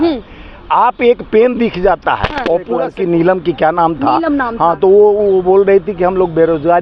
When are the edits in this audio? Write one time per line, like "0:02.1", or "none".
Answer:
0:02.9